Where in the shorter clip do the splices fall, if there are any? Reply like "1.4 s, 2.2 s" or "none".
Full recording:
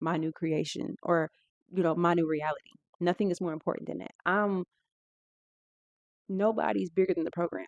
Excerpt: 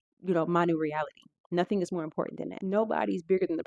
2.5 s